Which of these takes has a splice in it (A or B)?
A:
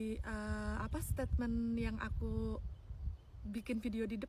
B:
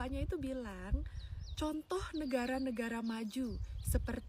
B